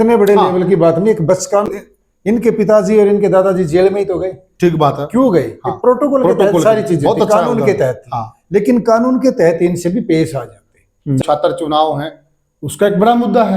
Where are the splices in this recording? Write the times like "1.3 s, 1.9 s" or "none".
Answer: 1.7 s, 11.2 s